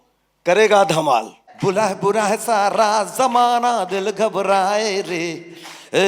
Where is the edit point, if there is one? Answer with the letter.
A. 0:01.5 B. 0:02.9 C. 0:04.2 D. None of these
A